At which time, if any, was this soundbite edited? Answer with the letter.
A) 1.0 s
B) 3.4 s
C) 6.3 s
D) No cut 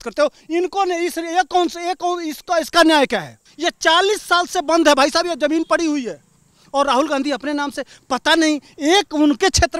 B